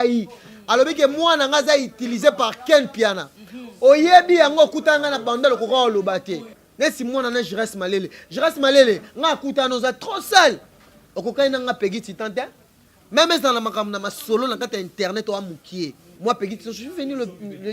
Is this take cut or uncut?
cut